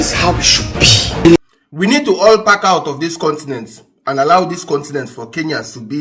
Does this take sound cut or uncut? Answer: cut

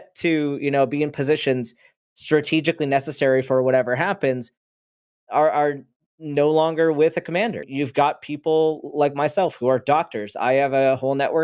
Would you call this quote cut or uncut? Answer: cut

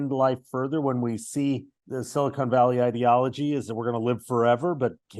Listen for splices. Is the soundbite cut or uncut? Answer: uncut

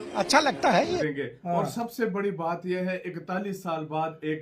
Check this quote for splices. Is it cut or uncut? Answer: cut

